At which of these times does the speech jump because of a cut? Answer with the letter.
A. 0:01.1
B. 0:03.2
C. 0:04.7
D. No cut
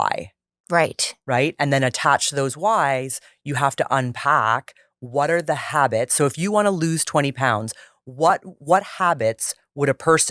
D